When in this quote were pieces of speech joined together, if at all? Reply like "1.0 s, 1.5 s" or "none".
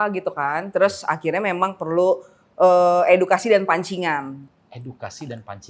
none

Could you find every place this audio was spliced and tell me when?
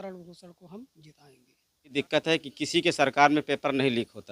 1.9 s

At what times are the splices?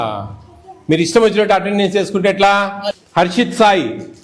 2.8 s

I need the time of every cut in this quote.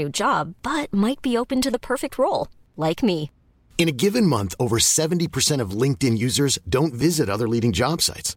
none

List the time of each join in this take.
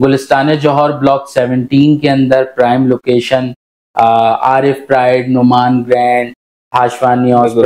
none

